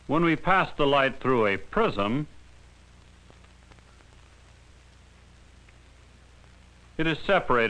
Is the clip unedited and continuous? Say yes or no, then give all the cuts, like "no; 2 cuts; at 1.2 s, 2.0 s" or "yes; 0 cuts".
yes; 0 cuts